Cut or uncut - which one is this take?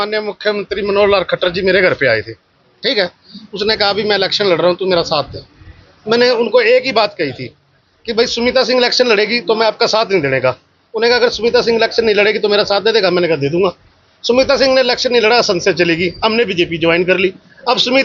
uncut